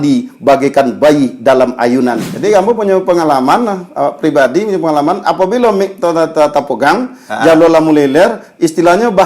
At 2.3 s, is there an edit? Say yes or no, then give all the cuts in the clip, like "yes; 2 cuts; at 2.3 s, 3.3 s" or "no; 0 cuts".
yes; 1 cut; at 2.3 s